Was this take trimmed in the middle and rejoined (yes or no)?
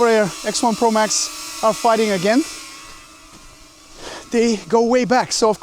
no